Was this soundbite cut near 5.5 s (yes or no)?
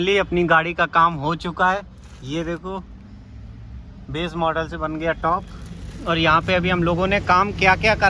no